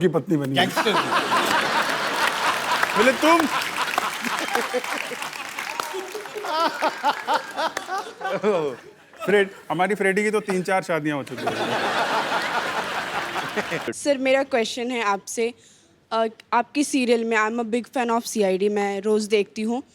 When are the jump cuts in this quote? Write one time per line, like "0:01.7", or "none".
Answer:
0:14.0